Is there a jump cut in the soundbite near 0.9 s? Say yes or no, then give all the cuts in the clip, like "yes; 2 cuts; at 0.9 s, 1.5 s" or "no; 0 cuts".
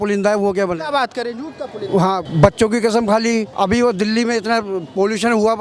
no; 2 cuts; at 2.3 s, 3.5 s